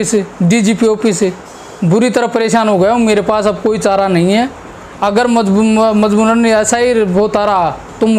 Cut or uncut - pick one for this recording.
uncut